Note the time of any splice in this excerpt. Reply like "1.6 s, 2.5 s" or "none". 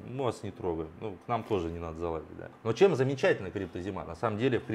2.5 s